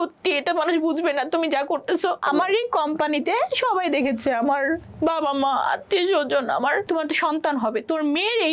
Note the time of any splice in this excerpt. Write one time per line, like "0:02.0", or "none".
0:02.2
0:06.8